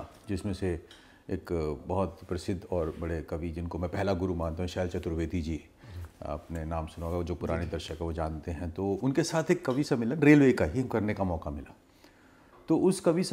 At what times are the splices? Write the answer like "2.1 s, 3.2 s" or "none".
none